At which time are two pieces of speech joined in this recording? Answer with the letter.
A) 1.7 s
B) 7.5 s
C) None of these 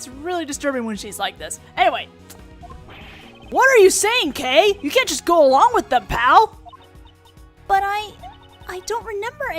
B